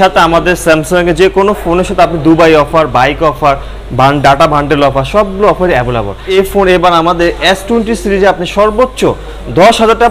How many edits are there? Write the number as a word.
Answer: one